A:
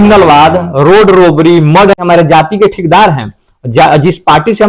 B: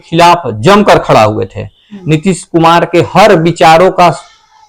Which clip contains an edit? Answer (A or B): A